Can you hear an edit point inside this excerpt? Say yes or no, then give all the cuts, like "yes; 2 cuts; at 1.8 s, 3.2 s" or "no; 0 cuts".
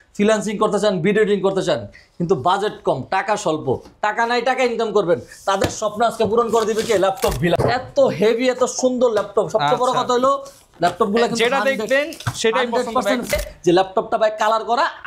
yes; 2 cuts; at 7.6 s, 13.3 s